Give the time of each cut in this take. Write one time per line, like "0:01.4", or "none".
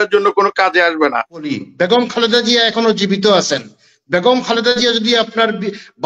0:01.5